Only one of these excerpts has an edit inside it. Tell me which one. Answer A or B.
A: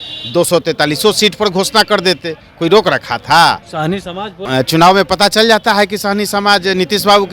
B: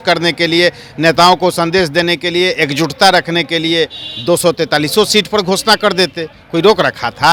A